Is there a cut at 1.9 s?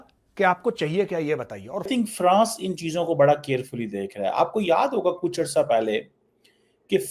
yes; 1 cut; at 1.9 s

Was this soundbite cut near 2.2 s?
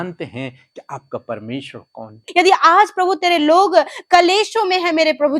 yes; 1 cut; at 2.2 s

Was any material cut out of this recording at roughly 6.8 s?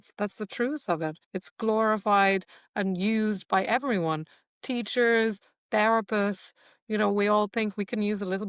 no; 1 cut; at 1.3 s

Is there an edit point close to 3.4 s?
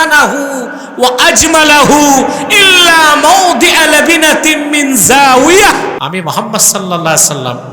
no; 1 cut; at 6.0 s

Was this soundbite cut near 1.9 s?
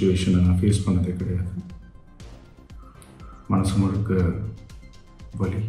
yes; 2 cuts; at 1.9 s, 3.1 s

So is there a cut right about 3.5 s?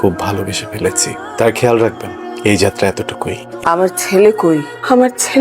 yes; 1 cut; at 3.5 s

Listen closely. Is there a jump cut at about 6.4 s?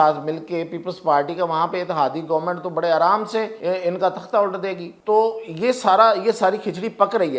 no; 2 cuts; at 3.5 s, 4.9 s

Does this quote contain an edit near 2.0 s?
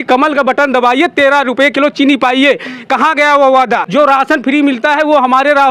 no; 1 cut; at 3.9 s

